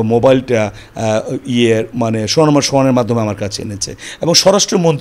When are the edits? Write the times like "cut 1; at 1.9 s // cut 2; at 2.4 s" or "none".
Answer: none

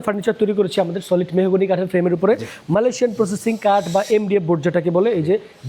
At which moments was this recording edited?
none

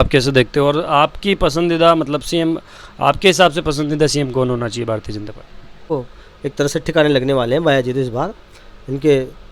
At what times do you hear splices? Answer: cut 1; at 5.9 s

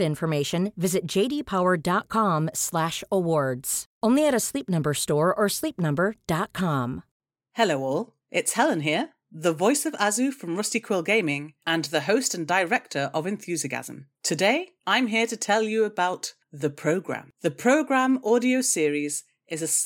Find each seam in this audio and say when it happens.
cut 1; at 7.1 s

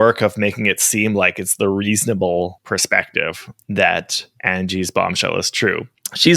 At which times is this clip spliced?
none

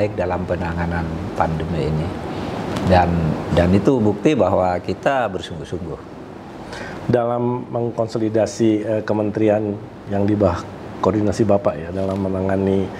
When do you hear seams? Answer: none

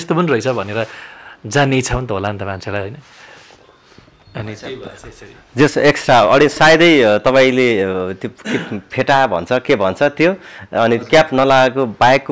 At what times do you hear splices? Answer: none

